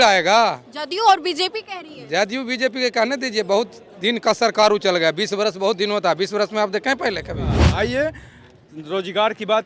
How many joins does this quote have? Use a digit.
1